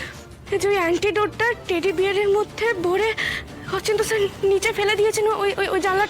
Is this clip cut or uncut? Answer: cut